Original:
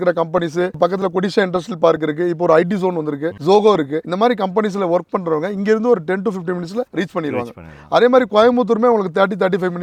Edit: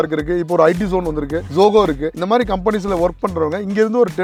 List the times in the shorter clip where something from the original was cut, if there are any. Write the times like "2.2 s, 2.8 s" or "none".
none